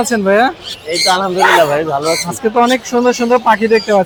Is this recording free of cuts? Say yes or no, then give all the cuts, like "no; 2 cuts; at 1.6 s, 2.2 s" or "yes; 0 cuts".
yes; 0 cuts